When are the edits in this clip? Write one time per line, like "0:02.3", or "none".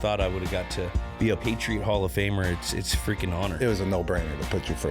0:01.4
0:03.6